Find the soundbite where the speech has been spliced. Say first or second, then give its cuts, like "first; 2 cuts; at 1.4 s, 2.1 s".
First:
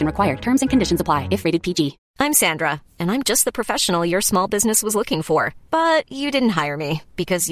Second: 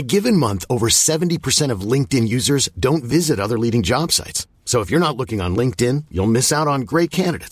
first; 1 cut; at 2.0 s